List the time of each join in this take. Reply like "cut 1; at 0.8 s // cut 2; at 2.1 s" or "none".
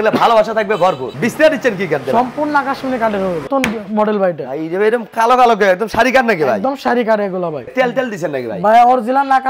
cut 1; at 1.1 s // cut 2; at 3.5 s // cut 3; at 7.7 s